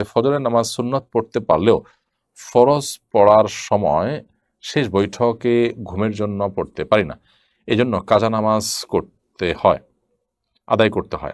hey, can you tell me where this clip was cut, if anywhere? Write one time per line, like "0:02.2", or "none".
none

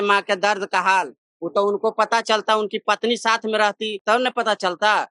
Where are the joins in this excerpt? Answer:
none

